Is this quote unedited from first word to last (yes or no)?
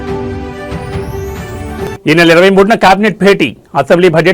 no